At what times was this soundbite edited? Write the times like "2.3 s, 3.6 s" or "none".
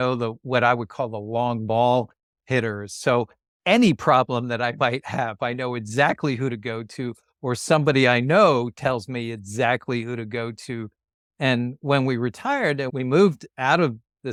none